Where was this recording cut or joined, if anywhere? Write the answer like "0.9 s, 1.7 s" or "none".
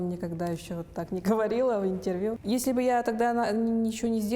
2.4 s